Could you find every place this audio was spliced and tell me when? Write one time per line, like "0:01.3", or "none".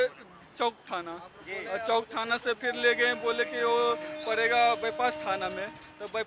none